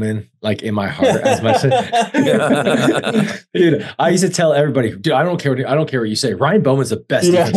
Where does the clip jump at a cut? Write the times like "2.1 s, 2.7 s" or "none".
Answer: none